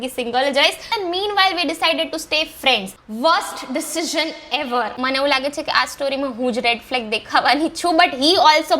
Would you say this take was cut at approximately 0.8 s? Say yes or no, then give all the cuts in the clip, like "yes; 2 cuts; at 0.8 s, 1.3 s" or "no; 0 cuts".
yes; 2 cuts; at 0.8 s, 5.0 s